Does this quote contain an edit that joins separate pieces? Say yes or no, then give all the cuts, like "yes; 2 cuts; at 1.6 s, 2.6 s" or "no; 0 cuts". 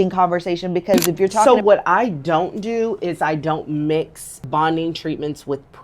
yes; 2 cuts; at 1.4 s, 4.5 s